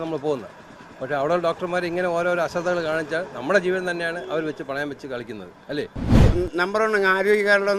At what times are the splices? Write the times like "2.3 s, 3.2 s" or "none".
6.2 s